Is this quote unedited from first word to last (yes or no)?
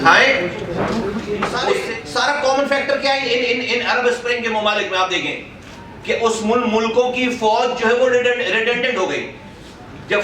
no